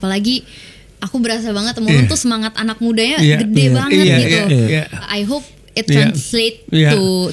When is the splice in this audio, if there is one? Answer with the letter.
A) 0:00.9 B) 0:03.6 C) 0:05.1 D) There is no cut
C